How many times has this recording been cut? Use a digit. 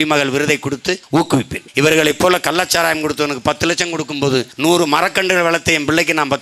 2